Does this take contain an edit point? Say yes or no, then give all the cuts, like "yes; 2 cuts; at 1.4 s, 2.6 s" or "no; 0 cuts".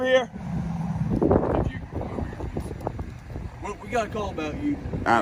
no; 0 cuts